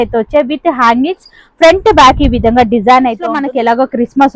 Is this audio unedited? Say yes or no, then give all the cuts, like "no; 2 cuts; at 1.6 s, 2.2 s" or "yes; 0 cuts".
no; 1 cut; at 3.4 s